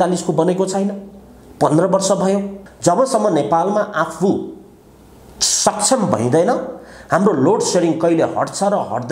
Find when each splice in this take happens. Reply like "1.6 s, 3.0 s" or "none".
2.6 s